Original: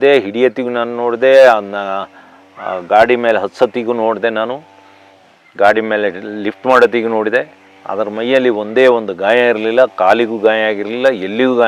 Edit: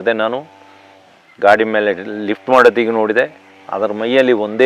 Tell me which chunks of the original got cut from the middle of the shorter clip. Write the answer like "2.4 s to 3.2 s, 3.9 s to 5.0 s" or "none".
none